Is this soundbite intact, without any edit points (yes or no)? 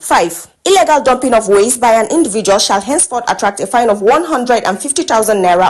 yes